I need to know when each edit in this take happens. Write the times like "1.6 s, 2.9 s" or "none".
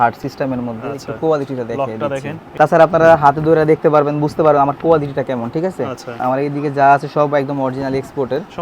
2.4 s, 6.2 s